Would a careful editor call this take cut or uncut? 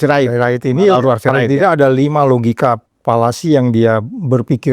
cut